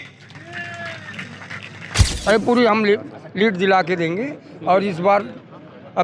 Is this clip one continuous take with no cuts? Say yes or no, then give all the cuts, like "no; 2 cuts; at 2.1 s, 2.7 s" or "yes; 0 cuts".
no; 1 cut; at 2.1 s